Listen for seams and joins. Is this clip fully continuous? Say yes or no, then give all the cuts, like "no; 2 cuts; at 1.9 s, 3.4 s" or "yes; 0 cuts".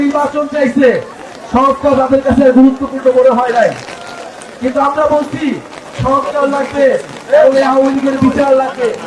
yes; 0 cuts